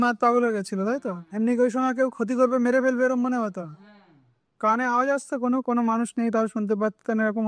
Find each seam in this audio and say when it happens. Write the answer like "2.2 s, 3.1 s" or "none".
none

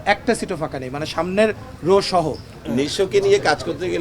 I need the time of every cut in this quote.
2.5 s

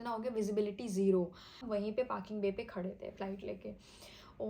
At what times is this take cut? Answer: 1.6 s

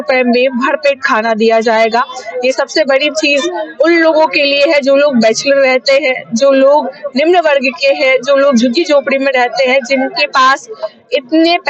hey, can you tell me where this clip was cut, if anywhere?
none

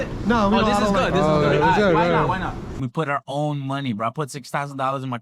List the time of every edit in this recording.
2.8 s

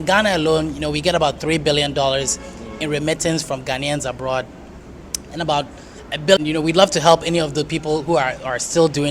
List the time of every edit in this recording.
6.4 s

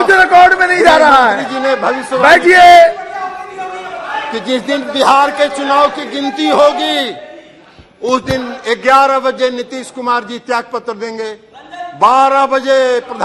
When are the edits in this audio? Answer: none

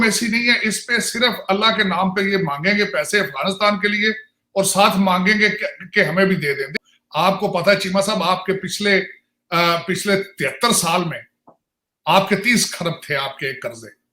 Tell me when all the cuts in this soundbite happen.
6.7 s

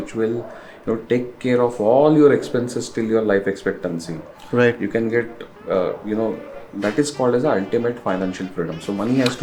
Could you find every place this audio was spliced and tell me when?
none

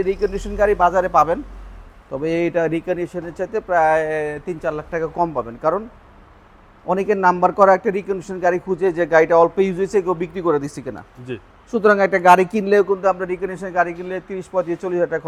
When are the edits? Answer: none

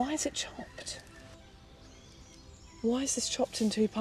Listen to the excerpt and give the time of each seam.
1.3 s

